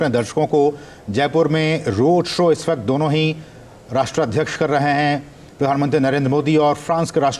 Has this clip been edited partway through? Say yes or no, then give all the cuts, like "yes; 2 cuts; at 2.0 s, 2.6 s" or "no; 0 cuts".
no; 0 cuts